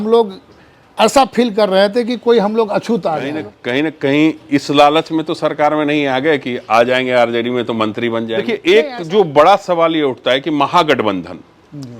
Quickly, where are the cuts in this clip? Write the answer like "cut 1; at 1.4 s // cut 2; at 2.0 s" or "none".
cut 1; at 3.5 s // cut 2; at 8.4 s